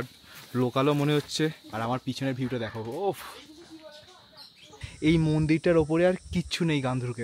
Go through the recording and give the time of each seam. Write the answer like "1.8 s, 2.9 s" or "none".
1.6 s, 4.8 s